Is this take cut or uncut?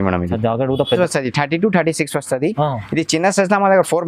cut